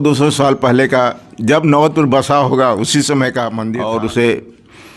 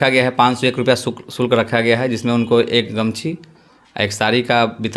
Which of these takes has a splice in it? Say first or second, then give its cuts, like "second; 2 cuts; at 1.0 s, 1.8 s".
first; 1 cut; at 3.6 s